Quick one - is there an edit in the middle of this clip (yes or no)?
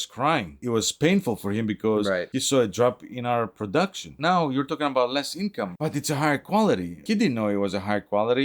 yes